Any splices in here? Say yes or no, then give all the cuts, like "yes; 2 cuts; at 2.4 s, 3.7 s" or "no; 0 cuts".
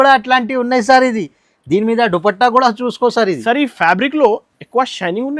no; 0 cuts